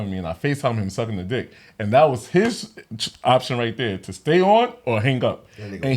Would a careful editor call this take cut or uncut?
uncut